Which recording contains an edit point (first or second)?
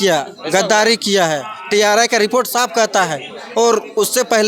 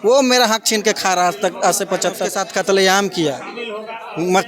second